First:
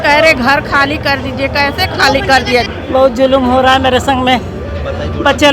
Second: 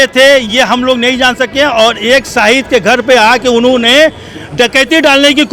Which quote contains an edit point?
first; 1 cut; at 2.7 s

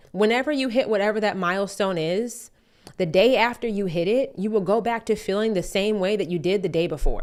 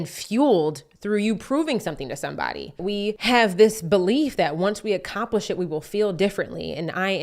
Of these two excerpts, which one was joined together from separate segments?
second; 1 cut; at 2.8 s

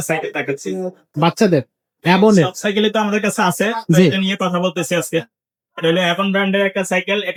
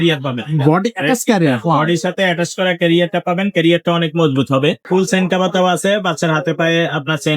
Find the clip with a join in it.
second; 1 cut; at 4.8 s

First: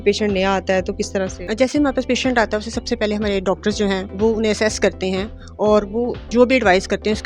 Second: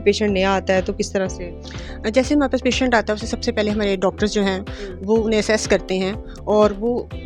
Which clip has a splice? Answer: first; 3 cuts; at 1.4 s, 4.1 s, 6.2 s

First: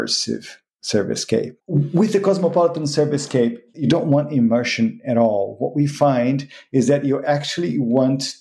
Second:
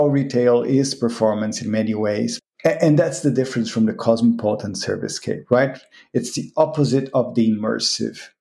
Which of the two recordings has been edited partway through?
first; 2 cuts; at 1.6 s, 3.7 s

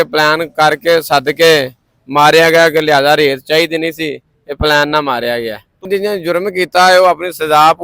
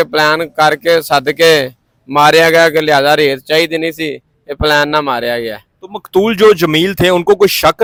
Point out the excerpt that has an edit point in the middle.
first; 1 cut; at 5.9 s

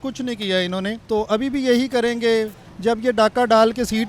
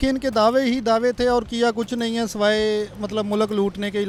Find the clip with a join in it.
first; 2 cuts; at 1.0 s, 2.6 s

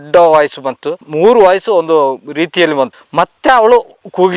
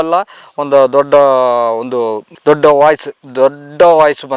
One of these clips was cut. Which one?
first; 1 cut; at 3.0 s

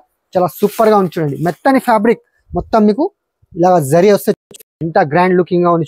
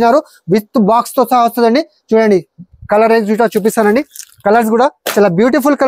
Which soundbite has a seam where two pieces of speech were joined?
first; 1 cut; at 4.6 s

